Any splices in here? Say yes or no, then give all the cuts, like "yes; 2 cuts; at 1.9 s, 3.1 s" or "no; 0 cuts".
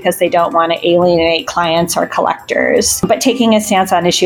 yes; 2 cuts; at 1.5 s, 3.0 s